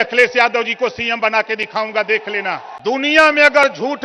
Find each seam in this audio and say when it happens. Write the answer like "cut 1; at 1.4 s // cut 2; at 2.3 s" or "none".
cut 1; at 2.6 s

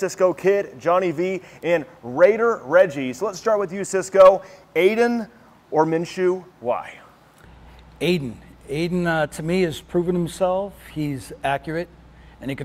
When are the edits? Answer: none

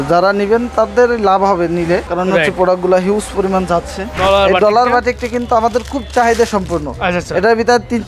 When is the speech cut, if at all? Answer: cut 1; at 2.1 s // cut 2; at 4.0 s

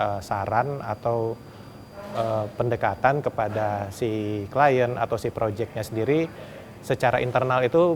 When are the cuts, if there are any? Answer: none

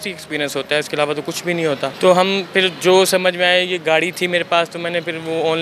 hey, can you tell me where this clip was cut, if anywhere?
cut 1; at 1.9 s

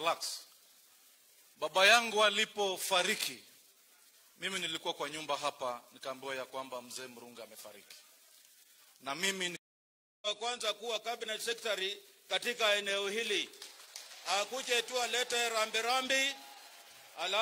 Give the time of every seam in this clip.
cut 1; at 9.5 s // cut 2; at 10.9 s

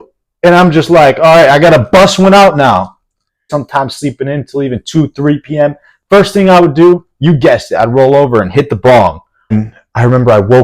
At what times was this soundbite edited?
cut 1; at 3.5 s // cut 2; at 9.5 s

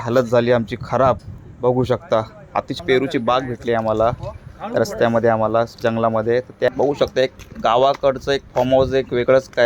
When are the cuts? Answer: cut 1; at 2.7 s // cut 2; at 6.7 s

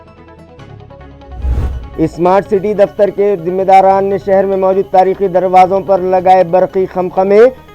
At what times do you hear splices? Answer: cut 1; at 1.9 s

